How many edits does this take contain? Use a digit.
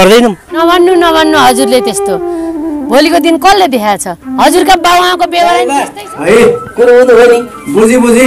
1